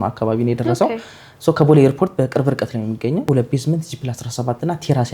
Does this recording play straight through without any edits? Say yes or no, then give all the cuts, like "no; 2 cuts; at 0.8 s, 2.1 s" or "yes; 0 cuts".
no; 1 cut; at 3.2 s